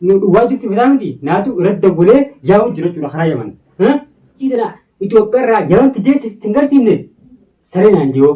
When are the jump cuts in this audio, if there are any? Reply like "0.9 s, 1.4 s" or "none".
4.4 s

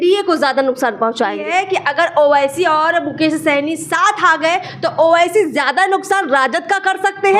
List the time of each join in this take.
1.4 s

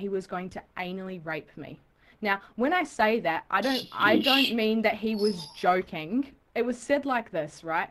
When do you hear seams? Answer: 6.4 s

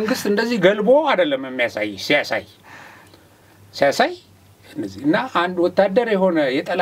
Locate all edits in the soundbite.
none

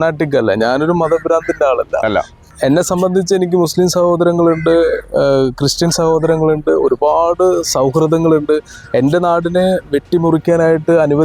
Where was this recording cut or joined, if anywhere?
2.4 s

